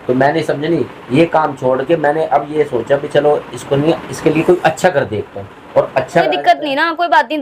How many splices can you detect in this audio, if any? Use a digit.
1